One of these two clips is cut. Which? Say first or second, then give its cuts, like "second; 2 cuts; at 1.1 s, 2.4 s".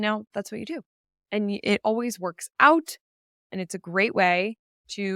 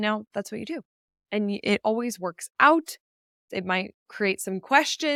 first; 1 cut; at 3.5 s